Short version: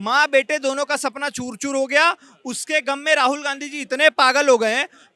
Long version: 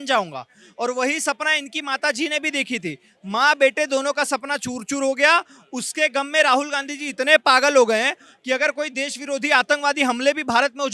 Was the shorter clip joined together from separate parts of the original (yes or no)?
no